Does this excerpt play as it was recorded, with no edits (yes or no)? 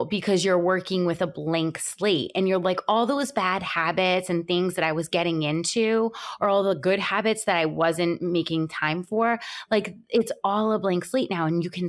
yes